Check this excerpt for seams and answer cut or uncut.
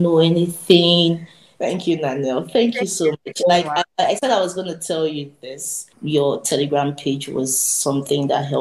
cut